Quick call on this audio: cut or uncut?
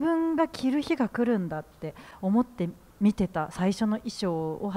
uncut